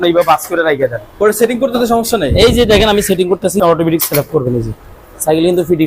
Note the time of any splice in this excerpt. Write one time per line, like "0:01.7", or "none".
0:01.0
0:03.6